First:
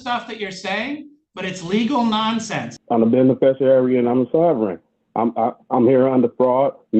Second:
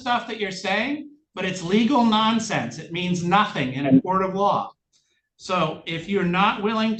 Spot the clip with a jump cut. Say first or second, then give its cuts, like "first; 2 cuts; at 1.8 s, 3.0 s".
first; 1 cut; at 2.7 s